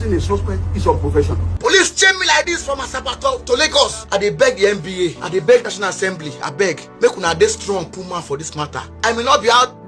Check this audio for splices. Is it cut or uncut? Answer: cut